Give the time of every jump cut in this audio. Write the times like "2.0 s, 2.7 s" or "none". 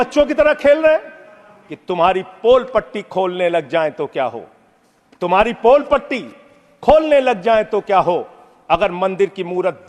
1.7 s

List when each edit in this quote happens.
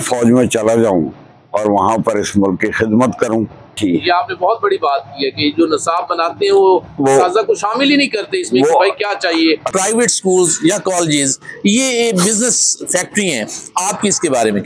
3.7 s, 9.7 s

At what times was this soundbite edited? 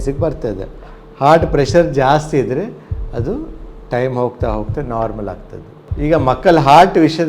5.9 s

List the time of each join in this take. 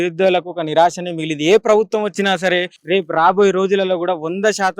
2.7 s

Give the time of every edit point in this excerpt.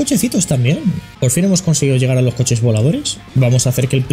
1.1 s, 3.2 s

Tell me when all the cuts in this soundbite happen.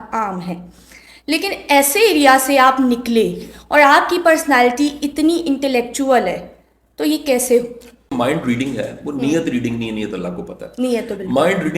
8.1 s

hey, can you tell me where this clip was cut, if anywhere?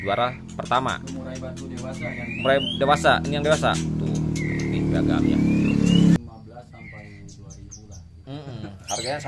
6.2 s

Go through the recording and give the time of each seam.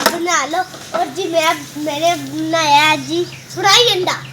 0.8 s, 3.4 s

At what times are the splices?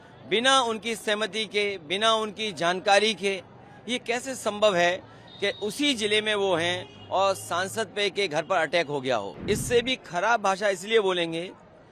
9.3 s

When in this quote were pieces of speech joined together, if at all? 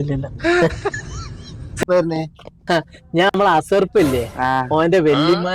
1.8 s

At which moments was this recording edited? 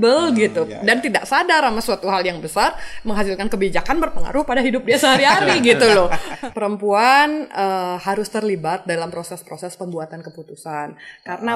6.2 s

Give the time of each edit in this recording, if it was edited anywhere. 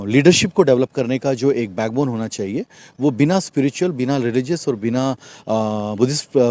none

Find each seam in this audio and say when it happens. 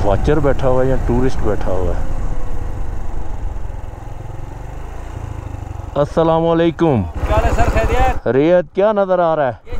none

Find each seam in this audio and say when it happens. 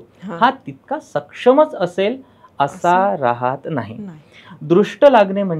none

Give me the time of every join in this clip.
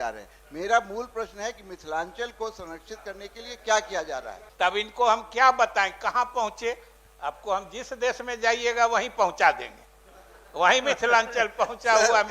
4.3 s

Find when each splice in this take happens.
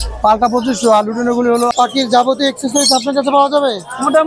1.7 s

